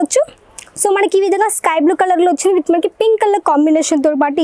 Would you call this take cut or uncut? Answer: uncut